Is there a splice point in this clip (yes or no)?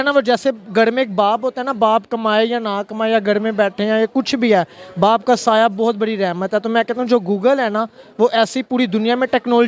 no